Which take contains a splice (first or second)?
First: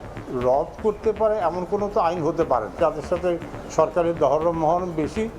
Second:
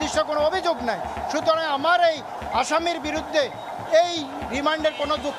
first